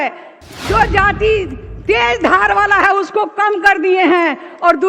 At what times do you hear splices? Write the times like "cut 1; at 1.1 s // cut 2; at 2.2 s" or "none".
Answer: none